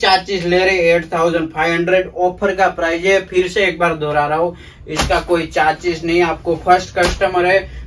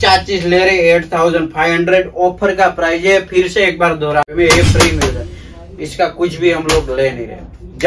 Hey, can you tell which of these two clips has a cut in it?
second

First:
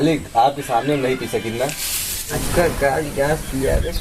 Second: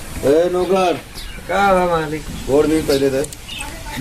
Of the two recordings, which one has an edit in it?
first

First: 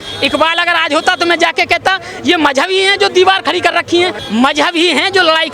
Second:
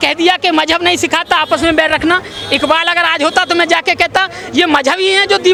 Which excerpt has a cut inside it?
first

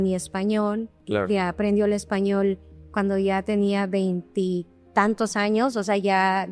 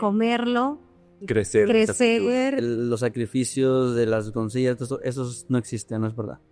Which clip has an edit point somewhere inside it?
second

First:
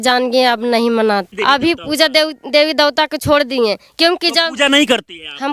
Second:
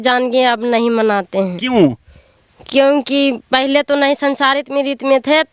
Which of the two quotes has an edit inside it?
first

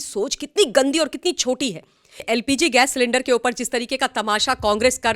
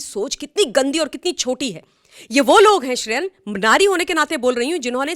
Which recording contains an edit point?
first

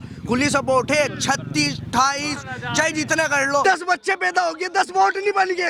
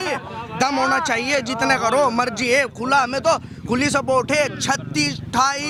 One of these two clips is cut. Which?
first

